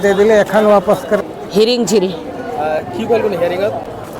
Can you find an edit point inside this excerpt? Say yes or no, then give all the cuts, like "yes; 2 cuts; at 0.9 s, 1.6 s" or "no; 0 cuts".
yes; 1 cut; at 1.2 s